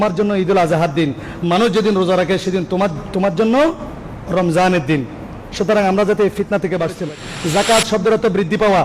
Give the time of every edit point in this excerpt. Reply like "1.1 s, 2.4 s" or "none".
7.0 s